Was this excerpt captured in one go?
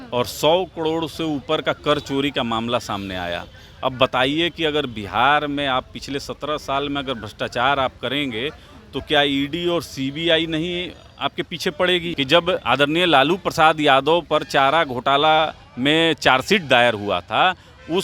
no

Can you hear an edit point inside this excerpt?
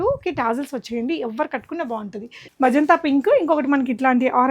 yes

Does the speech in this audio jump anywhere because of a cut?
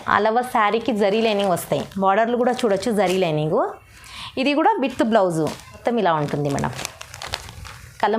yes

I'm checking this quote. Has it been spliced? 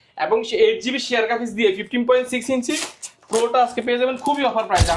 no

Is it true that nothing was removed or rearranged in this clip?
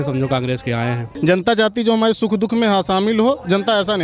no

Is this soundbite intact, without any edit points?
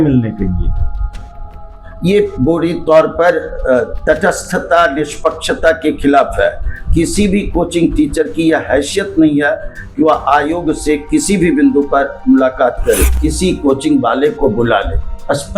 no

